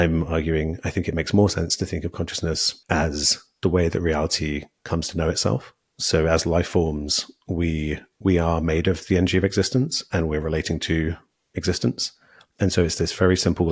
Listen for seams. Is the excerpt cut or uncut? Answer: cut